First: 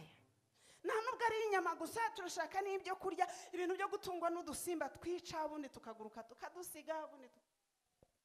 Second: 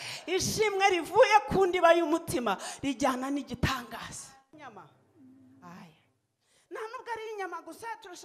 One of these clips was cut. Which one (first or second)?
second